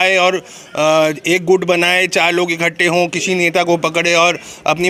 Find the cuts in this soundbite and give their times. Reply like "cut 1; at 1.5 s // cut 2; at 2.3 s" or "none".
none